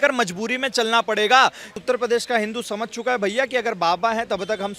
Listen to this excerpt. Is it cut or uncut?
cut